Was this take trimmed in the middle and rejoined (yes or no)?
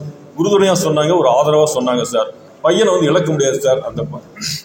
yes